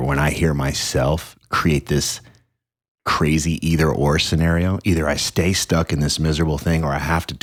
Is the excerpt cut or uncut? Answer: uncut